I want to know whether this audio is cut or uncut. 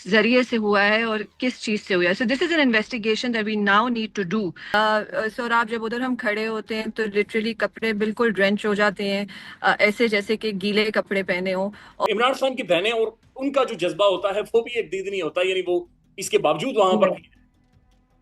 cut